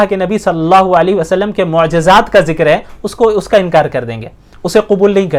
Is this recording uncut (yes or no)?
yes